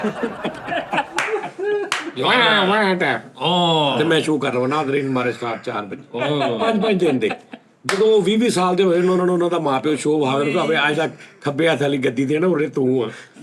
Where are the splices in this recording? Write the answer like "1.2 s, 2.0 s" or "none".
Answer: none

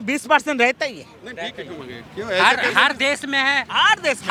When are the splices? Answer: none

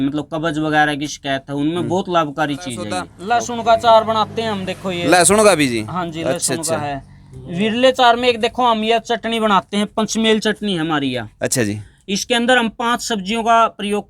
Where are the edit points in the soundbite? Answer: 3.1 s

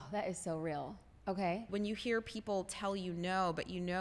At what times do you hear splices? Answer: 1.7 s

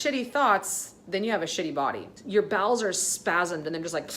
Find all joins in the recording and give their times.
2.1 s

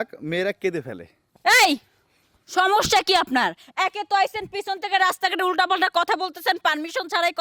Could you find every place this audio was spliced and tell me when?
1.2 s

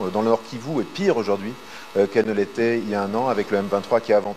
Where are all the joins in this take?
none

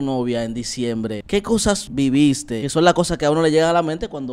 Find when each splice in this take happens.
1.3 s, 2.6 s

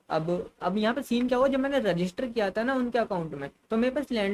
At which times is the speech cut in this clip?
none

